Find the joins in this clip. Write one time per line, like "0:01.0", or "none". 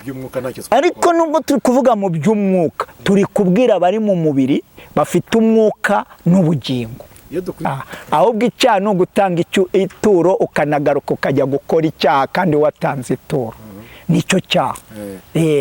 0:07.7